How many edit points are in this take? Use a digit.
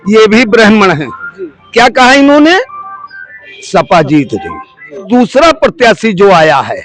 1